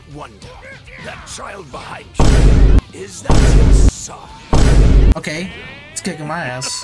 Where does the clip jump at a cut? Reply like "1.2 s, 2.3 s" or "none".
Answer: 5.1 s